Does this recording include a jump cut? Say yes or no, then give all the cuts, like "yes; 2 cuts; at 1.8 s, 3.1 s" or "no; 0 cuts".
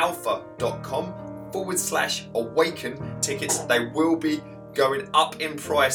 yes; 1 cut; at 3.1 s